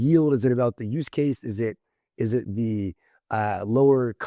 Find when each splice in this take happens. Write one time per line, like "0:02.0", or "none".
none